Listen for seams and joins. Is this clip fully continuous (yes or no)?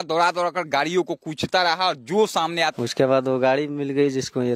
no